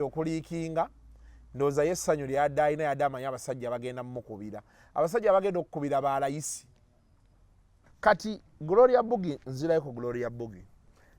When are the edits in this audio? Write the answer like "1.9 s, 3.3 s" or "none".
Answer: 7.9 s